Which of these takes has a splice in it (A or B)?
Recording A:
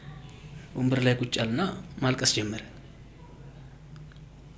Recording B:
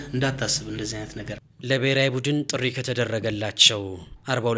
B